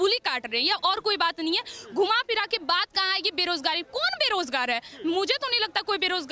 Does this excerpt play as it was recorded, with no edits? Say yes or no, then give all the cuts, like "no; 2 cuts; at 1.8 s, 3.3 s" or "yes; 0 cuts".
yes; 0 cuts